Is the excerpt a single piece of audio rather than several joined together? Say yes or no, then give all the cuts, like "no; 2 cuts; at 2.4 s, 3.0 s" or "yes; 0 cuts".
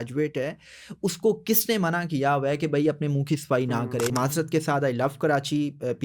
no; 1 cut; at 4.1 s